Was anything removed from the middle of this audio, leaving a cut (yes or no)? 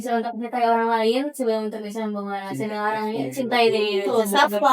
no